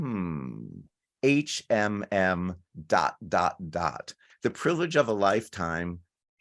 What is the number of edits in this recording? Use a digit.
1